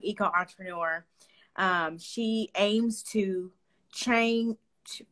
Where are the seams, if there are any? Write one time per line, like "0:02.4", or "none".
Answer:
none